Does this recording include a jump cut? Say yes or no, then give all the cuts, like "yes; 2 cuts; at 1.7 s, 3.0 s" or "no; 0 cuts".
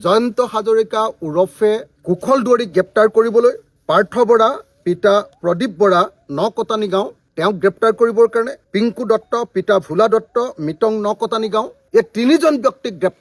no; 0 cuts